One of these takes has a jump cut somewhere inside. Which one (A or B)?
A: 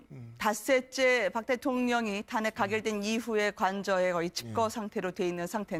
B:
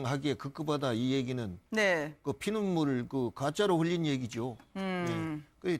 B